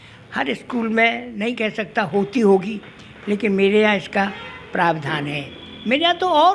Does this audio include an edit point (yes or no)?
no